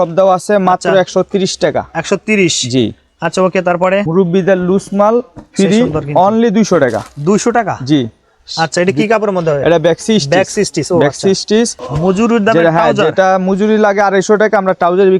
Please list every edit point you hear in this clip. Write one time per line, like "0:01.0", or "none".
0:04.1
0:11.9